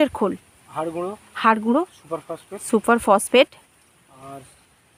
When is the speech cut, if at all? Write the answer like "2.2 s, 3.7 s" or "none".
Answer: none